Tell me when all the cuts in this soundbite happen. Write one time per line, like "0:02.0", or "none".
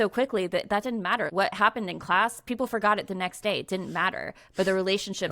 0:01.3

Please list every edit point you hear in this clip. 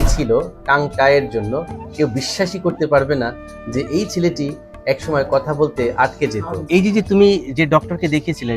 0:01.8
0:06.5

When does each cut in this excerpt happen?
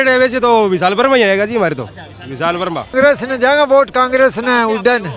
0:02.9

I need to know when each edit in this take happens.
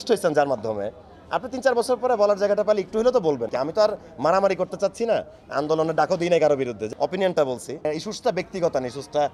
0:03.5
0:06.8
0:07.9

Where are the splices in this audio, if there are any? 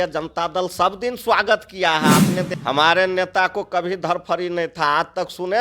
0:02.5

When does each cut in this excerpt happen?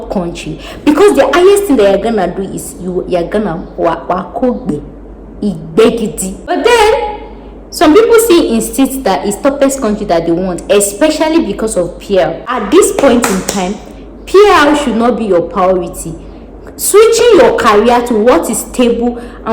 0:06.5
0:12.5

